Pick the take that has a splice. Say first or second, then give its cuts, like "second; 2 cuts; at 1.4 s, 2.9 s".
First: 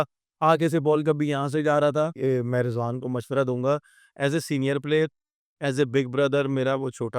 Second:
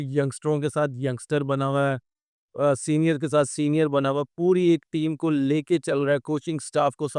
first; 1 cut; at 2.1 s